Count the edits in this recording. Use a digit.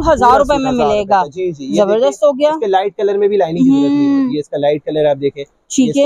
0